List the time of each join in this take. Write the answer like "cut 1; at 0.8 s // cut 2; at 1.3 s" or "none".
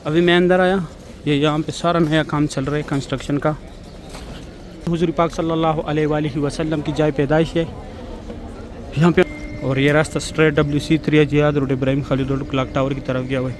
cut 1; at 4.9 s // cut 2; at 9.2 s